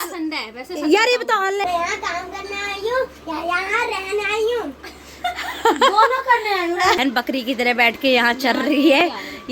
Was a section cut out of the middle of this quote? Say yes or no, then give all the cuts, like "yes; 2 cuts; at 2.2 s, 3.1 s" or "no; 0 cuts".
yes; 2 cuts; at 1.6 s, 7.0 s